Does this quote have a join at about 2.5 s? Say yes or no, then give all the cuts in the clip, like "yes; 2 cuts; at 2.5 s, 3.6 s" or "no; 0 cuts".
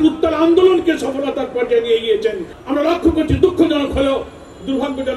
yes; 1 cut; at 2.5 s